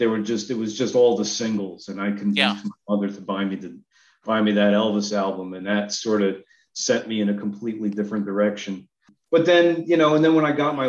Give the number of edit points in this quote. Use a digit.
1